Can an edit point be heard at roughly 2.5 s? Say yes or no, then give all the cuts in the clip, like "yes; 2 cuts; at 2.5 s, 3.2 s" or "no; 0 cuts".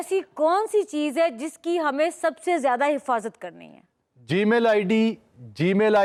no; 0 cuts